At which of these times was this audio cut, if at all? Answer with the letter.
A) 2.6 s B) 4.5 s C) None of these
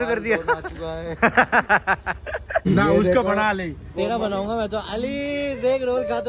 A